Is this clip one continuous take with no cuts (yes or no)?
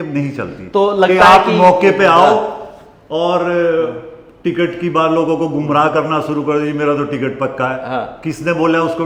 yes